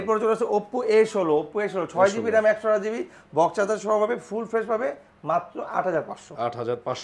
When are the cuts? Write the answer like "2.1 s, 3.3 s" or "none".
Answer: none